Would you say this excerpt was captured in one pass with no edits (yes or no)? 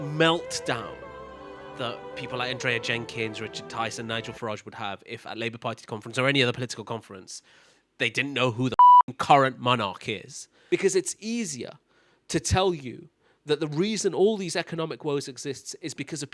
no